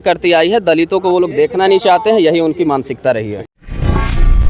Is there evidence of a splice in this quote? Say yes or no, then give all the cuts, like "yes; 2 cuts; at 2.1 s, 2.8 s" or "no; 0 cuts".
no; 0 cuts